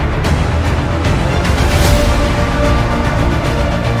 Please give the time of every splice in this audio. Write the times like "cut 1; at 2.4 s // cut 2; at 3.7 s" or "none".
none